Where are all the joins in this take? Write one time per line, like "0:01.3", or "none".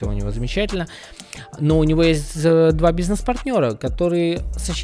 none